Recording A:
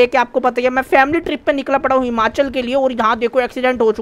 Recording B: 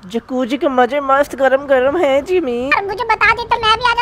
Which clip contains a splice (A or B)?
B